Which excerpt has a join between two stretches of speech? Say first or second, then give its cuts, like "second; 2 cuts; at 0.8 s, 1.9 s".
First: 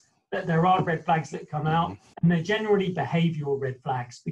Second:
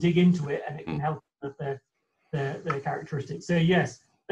first; 1 cut; at 2.1 s